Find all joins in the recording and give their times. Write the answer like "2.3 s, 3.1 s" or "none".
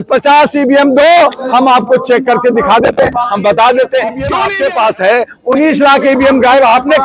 4.4 s